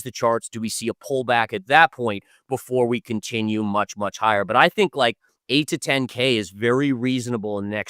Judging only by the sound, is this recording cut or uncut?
uncut